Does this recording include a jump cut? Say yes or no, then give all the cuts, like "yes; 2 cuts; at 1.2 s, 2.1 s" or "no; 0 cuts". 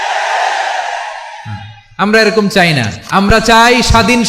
yes; 1 cut; at 3.0 s